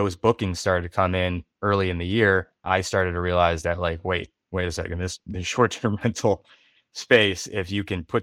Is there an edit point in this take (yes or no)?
no